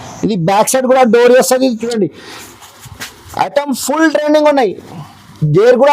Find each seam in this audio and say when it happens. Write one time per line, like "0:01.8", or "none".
0:01.8